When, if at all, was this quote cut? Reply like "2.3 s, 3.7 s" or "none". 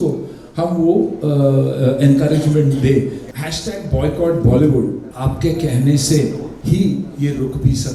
3.2 s, 5.1 s, 6.5 s